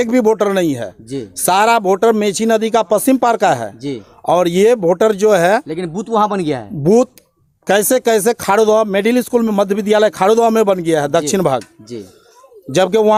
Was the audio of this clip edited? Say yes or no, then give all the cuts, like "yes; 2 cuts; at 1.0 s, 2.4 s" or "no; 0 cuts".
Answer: no; 0 cuts